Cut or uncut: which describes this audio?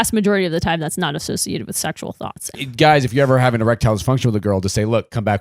cut